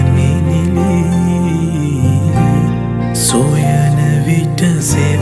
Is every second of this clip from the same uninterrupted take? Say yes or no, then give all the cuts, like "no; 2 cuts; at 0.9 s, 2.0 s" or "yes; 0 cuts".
yes; 0 cuts